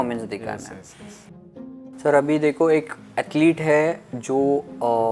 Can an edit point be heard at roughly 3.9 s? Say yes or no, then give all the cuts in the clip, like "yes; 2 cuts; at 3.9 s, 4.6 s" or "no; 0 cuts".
no; 1 cut; at 1.5 s